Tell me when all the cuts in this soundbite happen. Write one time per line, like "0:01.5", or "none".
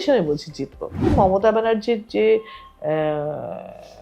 0:01.1